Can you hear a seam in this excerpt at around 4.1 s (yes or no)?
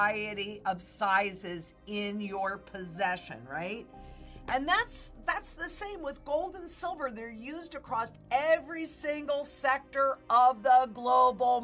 yes